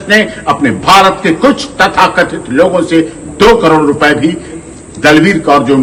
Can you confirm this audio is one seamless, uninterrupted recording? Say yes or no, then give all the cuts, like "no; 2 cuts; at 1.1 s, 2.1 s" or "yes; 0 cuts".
yes; 0 cuts